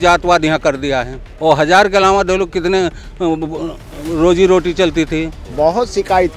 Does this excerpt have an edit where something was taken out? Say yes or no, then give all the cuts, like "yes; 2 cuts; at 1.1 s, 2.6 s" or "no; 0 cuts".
yes; 2 cuts; at 1.2 s, 5.4 s